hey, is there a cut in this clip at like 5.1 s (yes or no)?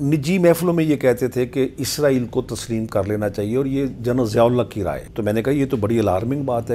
yes